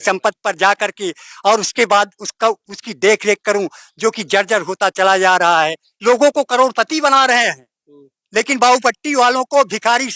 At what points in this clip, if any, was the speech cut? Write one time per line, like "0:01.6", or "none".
0:05.9